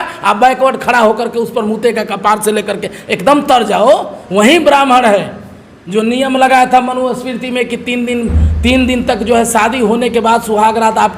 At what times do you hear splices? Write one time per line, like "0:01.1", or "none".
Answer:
0:04.2

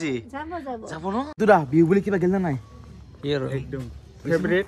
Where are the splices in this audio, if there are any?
0:01.3

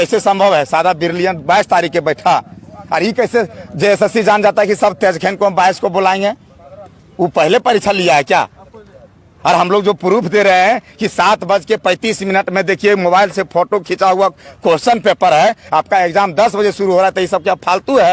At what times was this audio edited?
none

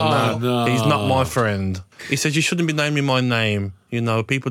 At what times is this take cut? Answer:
0:01.9

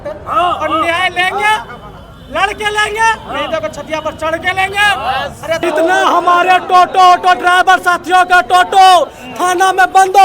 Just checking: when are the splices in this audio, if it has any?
0:05.6

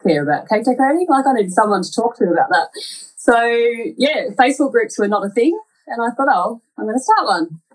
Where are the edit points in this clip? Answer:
none

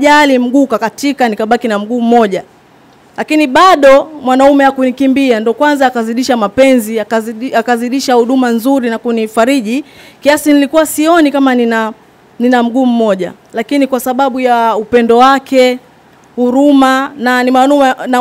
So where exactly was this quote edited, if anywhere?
none

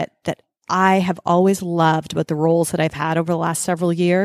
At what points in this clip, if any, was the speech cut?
none

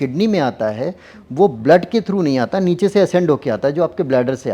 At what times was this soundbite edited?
none

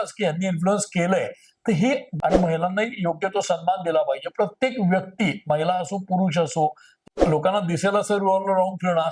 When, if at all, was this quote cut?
0:02.1
0:06.9

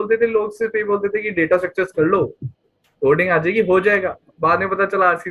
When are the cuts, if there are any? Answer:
none

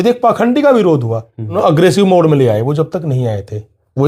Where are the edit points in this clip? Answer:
0:01.6

